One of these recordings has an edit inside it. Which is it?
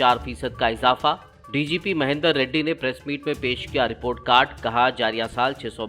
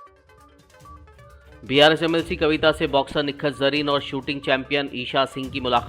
second; 1 cut; at 1.0 s

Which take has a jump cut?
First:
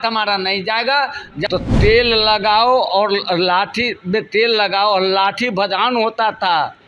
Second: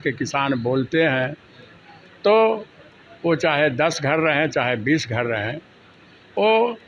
first; 1 cut; at 1.3 s

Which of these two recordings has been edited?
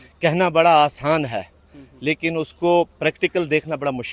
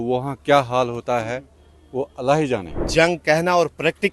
second; 1 cut; at 2.8 s

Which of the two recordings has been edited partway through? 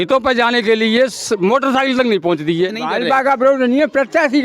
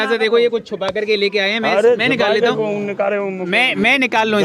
first; 1 cut; at 2.8 s

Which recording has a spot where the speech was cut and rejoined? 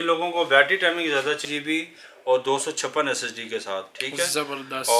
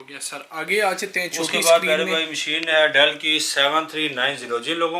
first; 1 cut; at 1.5 s

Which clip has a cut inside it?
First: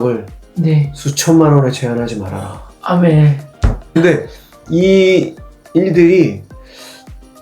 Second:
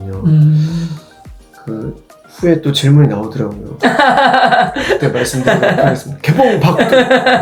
first; 1 cut; at 4.0 s

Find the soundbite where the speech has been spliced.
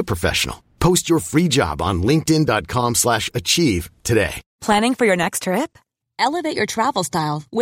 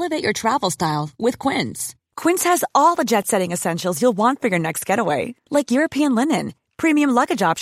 first; 1 cut; at 4.4 s

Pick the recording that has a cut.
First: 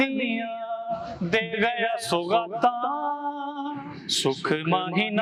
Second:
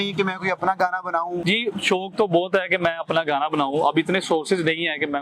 second; 1 cut; at 1.4 s

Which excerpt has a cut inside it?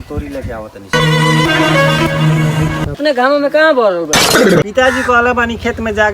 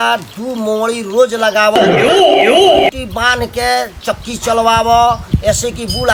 first; 1 cut; at 3.0 s

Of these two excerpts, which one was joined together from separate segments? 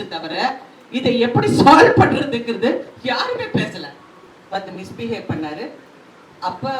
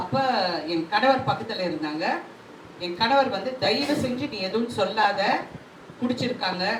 first; 1 cut; at 4.2 s

